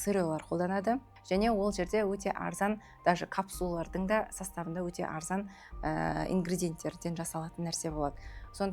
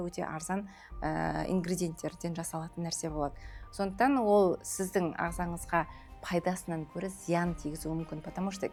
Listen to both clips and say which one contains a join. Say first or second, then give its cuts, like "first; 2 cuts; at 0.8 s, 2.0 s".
first; 1 cut; at 1.1 s